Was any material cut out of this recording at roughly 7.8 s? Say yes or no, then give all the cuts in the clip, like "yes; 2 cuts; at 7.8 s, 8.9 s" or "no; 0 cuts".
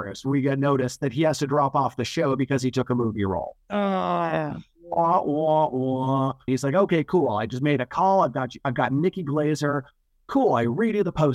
no; 1 cut; at 6.5 s